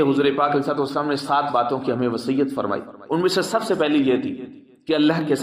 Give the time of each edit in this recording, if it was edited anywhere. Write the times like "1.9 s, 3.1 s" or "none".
none

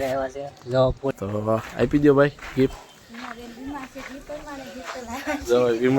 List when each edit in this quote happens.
1.1 s

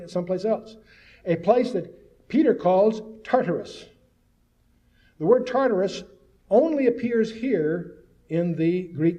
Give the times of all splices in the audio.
5.6 s

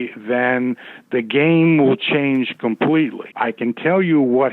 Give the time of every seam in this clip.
3.2 s

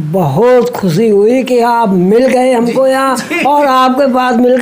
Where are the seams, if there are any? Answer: none

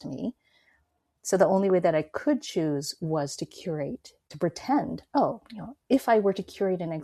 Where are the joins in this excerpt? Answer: 4.3 s

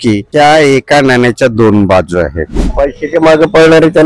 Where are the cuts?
2.7 s

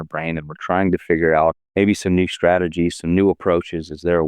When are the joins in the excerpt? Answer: 1.6 s

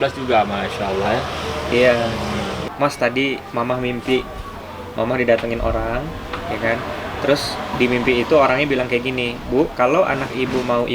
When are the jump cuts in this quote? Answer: 2.6 s

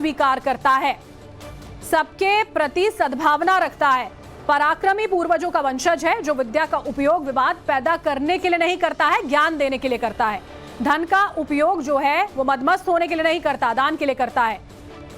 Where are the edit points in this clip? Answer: 3.7 s

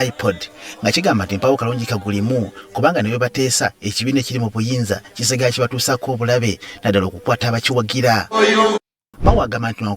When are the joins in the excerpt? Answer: 9.0 s

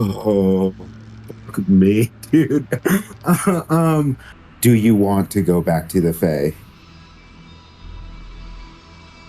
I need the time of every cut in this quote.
4.3 s

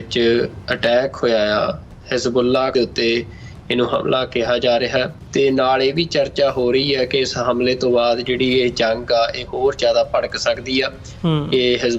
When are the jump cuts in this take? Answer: 2.7 s, 5.2 s

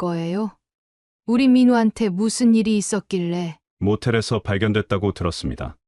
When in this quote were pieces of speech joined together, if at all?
3.6 s

